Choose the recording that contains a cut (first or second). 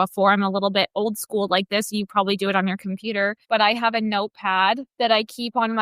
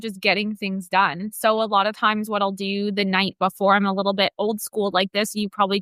first